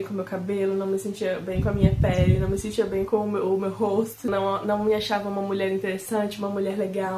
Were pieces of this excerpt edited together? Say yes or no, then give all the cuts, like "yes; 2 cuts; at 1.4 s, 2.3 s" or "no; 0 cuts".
yes; 1 cut; at 4.3 s